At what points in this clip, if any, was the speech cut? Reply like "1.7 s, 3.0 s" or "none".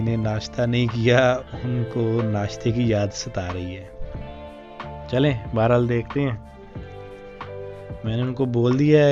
none

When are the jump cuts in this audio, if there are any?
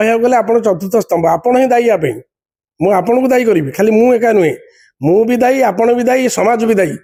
none

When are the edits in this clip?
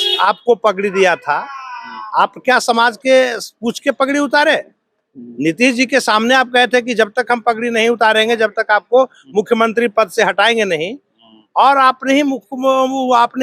none

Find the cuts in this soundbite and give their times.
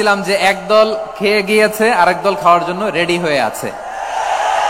none

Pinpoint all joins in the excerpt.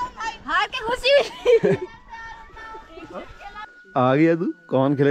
3.6 s

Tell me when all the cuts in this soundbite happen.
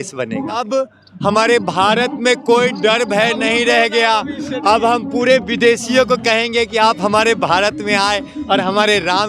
0.9 s

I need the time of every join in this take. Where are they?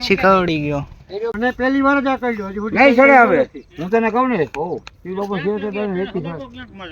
1.3 s

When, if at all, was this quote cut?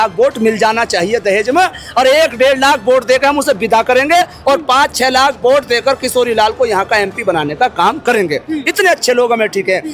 none

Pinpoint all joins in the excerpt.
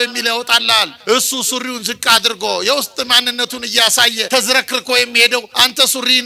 0.9 s, 4.3 s, 5.5 s

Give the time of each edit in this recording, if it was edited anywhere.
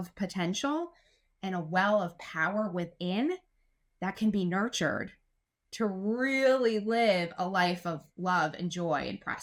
none

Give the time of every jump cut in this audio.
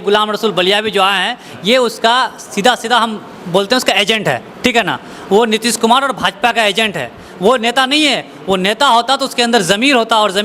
none

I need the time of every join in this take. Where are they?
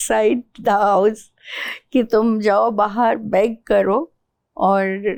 none

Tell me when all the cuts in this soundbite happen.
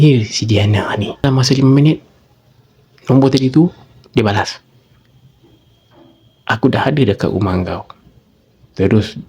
1.2 s

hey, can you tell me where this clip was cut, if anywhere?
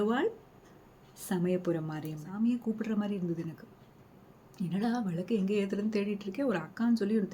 2.2 s

